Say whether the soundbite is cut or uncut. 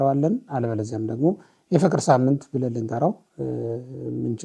uncut